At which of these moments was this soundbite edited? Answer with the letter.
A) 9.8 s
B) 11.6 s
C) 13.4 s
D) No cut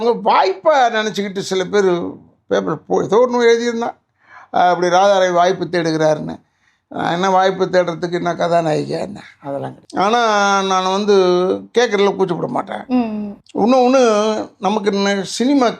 A